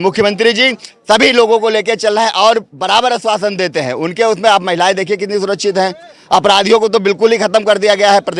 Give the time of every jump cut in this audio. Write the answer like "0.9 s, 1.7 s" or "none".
none